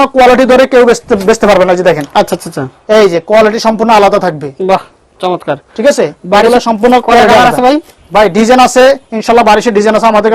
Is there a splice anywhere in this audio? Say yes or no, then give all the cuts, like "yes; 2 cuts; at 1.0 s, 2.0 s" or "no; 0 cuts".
no; 0 cuts